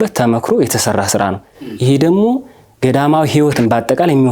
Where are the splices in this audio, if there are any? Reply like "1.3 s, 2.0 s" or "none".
none